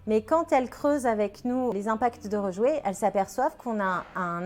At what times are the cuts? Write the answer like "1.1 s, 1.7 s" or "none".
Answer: 1.7 s